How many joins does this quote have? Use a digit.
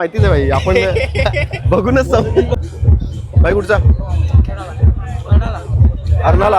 1